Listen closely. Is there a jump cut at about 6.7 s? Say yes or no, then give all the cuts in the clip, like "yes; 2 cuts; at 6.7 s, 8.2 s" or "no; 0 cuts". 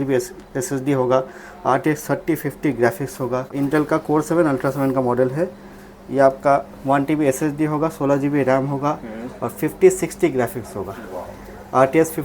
no; 1 cut; at 3.5 s